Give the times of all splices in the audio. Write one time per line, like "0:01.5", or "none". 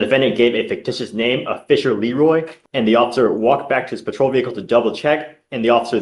0:02.5